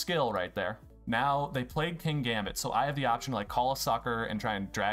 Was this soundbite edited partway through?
yes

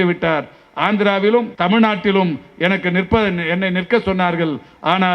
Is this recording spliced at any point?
yes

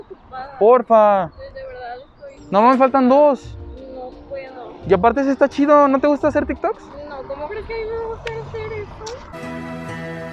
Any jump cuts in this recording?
no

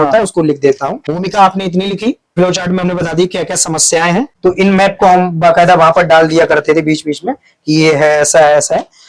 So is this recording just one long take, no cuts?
no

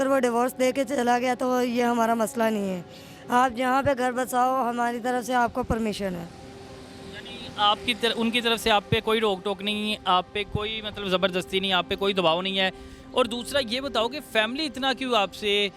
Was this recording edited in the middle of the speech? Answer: no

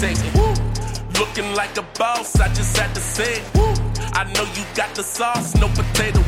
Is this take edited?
yes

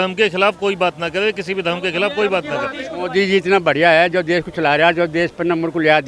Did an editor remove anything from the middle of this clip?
yes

